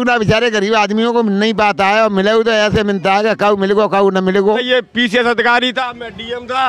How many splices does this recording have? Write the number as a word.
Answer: one